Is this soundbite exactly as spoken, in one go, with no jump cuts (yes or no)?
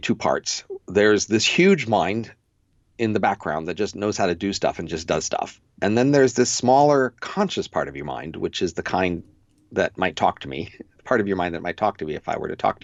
yes